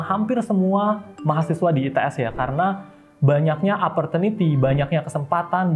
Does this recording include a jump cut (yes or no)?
no